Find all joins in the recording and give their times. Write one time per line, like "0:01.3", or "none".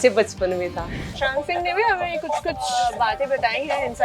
0:01.1
0:02.7